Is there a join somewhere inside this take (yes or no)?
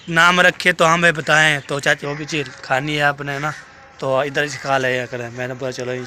yes